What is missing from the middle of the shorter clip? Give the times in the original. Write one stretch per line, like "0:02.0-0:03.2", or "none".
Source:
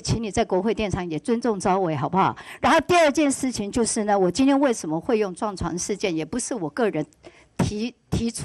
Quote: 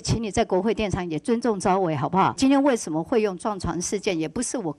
0:02.4-0:04.3